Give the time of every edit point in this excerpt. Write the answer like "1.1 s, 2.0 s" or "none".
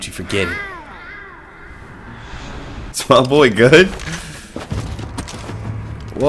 2.9 s